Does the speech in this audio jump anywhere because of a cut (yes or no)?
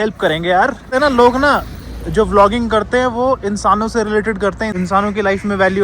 yes